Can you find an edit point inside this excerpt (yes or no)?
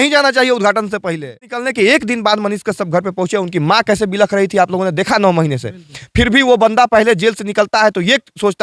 yes